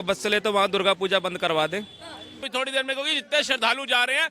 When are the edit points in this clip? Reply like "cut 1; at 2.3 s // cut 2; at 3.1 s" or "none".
cut 1; at 2.5 s